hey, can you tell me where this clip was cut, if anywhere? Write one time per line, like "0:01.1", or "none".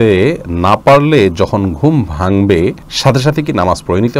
0:02.9